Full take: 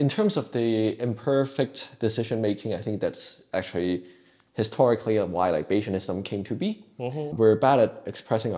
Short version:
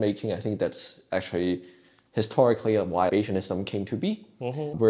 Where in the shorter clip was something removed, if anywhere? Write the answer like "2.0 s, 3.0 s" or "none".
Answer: 3.1 s